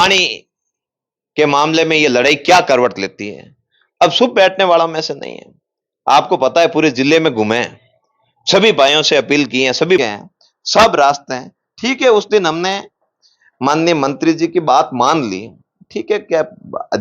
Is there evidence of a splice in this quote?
yes; 1 cut; at 10.0 s

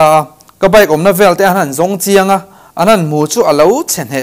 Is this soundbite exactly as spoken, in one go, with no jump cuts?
yes; 0 cuts

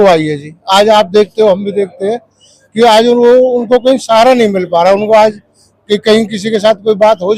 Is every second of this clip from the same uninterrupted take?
yes; 0 cuts

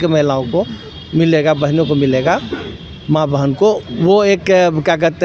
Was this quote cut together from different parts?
no; 0 cuts

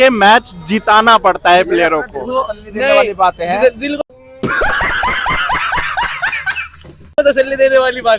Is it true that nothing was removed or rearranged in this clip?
yes; 0 cuts

